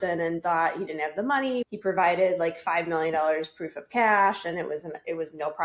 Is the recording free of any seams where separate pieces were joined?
yes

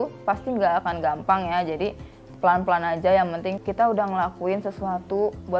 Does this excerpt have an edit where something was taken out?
yes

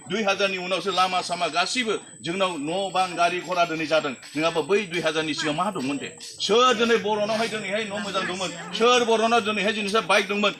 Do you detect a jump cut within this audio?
no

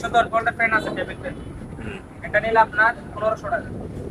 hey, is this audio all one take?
yes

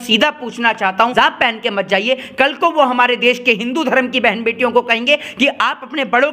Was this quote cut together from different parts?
yes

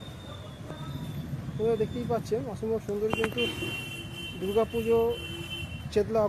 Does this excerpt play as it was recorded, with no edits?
yes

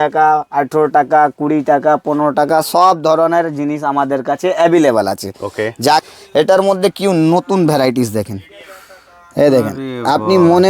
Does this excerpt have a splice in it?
yes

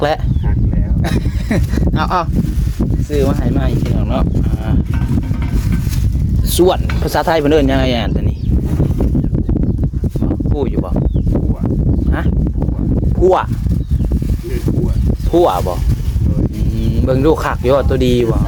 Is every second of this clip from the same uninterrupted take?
yes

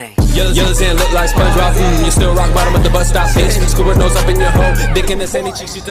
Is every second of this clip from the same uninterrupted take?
yes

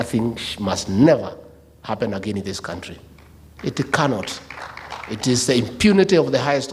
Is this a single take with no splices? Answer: yes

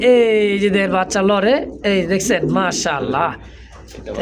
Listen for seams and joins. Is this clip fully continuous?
yes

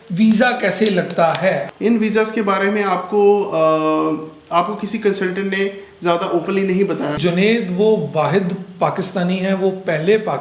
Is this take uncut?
no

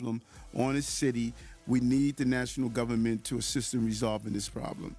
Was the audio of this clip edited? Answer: no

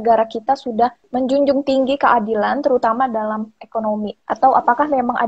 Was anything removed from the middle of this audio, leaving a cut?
yes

